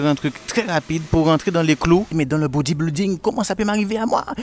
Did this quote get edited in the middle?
yes; 1 cut; at 2.1 s

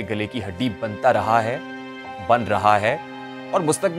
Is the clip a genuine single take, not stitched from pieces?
yes; 0 cuts

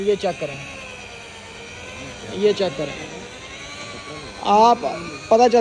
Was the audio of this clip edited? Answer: no; 0 cuts

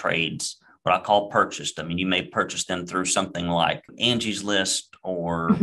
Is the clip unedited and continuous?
no; 1 cut; at 3.9 s

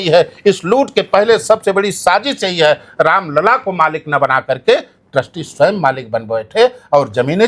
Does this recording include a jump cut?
no; 0 cuts

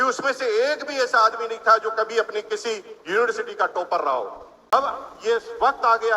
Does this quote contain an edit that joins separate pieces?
yes; 1 cut; at 4.7 s

